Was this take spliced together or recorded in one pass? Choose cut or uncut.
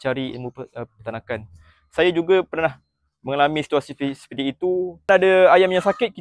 cut